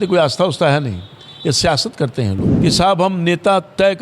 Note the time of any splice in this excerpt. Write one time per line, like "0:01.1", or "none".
0:02.5